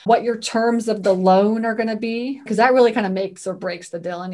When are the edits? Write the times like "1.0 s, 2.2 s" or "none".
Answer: 2.4 s

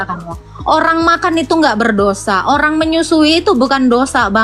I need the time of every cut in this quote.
none

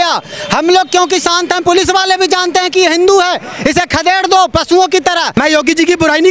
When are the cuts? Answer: 5.3 s

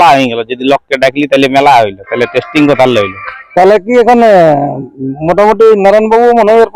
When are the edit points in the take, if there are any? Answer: none

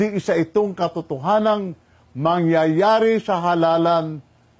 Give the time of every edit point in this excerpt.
none

